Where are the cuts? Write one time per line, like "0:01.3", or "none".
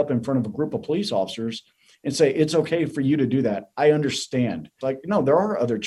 0:04.7